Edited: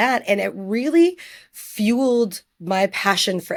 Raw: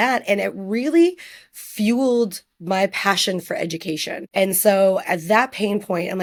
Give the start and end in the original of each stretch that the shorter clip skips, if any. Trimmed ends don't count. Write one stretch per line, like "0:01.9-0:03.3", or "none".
none